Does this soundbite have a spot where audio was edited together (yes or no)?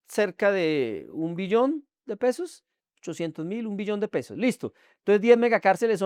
no